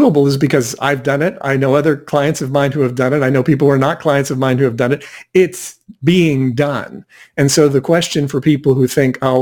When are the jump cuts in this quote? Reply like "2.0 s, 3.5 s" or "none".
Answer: none